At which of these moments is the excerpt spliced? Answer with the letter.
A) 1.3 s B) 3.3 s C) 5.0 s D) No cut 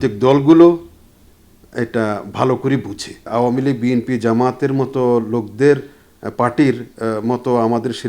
B